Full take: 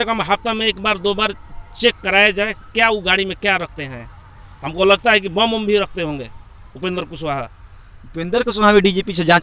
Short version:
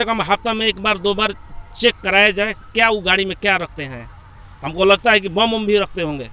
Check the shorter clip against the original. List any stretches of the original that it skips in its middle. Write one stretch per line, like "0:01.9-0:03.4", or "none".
none